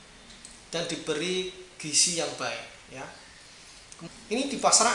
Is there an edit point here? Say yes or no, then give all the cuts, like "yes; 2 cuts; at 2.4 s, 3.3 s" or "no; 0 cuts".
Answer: yes; 1 cut; at 3.9 s